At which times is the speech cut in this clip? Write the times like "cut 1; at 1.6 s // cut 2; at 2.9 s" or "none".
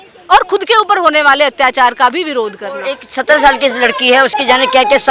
cut 1; at 3.1 s